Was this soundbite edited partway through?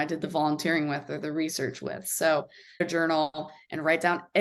yes; 1 cut; at 2.8 s

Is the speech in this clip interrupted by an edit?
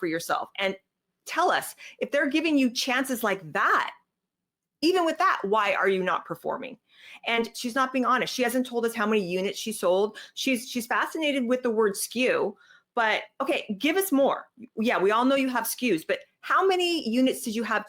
yes; 1 cut; at 7.6 s

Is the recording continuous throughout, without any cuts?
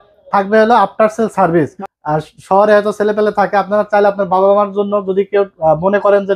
no; 1 cut; at 1.7 s

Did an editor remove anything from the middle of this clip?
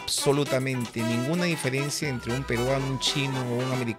no; 0 cuts

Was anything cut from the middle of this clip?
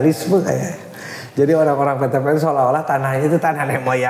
no; 0 cuts

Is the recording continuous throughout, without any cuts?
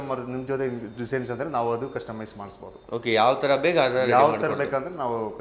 yes; 0 cuts

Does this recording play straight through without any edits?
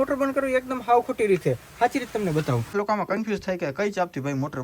no; 1 cut; at 2.7 s

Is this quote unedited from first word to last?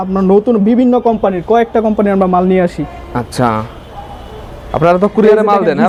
yes; 0 cuts

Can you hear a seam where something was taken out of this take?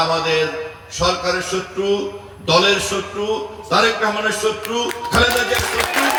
no; 0 cuts

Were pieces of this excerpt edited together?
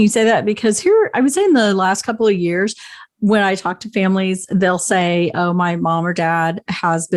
no; 0 cuts

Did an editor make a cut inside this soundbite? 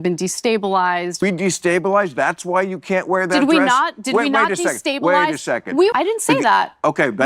yes; 2 cuts; at 1.2 s, 5.9 s

